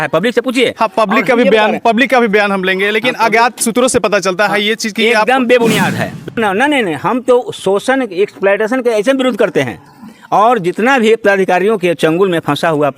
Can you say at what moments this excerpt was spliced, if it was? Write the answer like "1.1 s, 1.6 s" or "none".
6.4 s